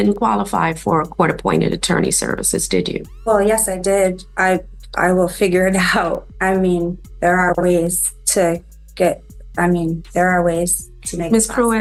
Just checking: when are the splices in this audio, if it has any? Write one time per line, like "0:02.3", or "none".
none